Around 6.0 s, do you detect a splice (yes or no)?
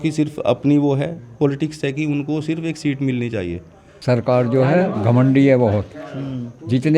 no